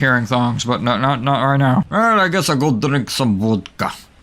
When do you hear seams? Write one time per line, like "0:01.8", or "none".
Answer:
0:01.9